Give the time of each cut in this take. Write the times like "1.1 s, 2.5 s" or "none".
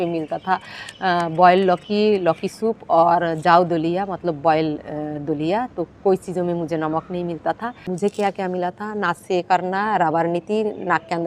7.9 s